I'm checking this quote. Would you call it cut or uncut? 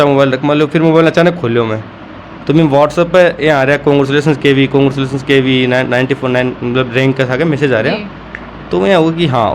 uncut